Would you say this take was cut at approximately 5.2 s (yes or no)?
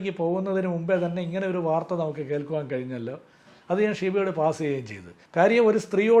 yes